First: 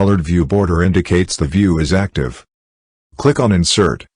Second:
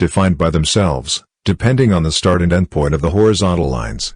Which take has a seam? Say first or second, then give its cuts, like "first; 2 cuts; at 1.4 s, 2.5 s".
second; 1 cut; at 3.0 s